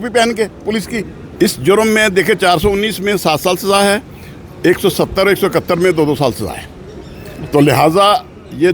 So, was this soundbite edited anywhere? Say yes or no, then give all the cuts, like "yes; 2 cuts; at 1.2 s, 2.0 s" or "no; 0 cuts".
yes; 1 cut; at 1.2 s